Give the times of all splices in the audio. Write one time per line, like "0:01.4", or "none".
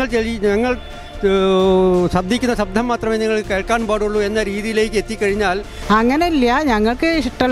0:05.7